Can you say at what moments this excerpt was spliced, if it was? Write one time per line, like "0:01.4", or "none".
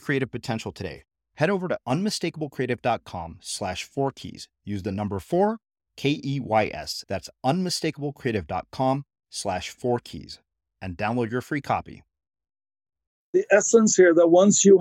0:13.4

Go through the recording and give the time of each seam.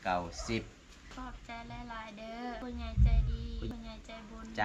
0:01.1
0:02.6
0:03.6

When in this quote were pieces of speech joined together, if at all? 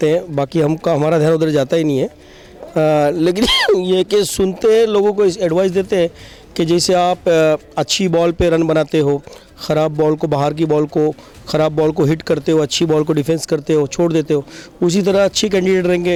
none

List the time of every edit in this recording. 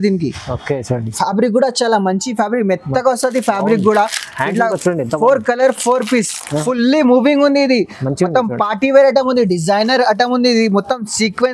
0:06.5

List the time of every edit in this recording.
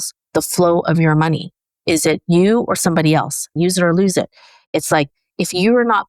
0:03.5

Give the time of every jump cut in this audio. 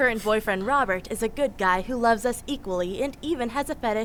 none

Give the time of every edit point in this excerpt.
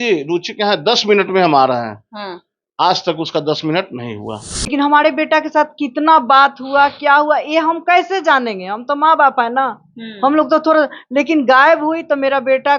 0:04.7

